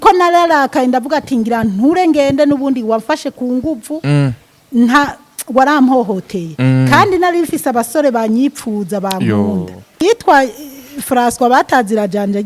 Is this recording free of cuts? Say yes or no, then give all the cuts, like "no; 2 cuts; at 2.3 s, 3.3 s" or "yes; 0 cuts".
no; 1 cut; at 10.0 s